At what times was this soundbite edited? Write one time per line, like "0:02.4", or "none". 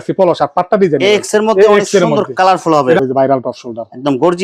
0:03.0